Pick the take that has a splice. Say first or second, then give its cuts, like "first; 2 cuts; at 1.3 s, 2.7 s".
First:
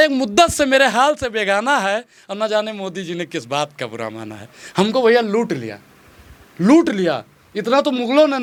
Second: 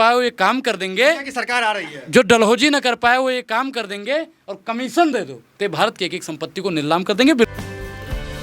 second; 1 cut; at 7.5 s